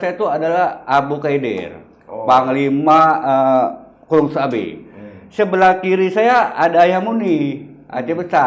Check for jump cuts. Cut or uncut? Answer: uncut